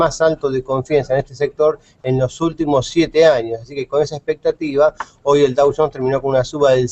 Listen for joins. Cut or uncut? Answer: cut